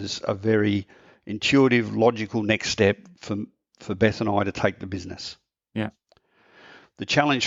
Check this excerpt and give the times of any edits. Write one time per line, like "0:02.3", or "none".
none